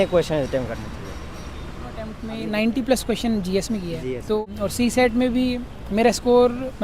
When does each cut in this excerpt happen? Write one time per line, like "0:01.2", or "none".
0:02.2
0:04.4